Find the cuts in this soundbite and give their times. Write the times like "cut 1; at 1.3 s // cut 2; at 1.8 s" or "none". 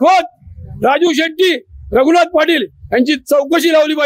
none